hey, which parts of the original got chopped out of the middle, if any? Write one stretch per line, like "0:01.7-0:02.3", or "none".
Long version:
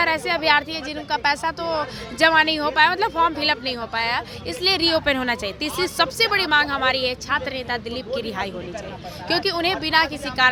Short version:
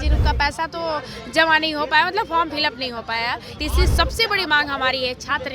0:04.4-0:05.5